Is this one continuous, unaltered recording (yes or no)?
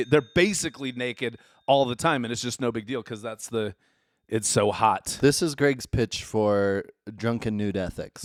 yes